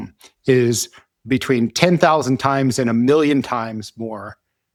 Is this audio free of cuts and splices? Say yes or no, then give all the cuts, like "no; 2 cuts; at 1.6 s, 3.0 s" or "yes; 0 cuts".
yes; 0 cuts